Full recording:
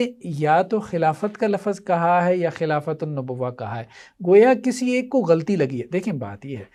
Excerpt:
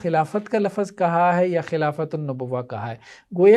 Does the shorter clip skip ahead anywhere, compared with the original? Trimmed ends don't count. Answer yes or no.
no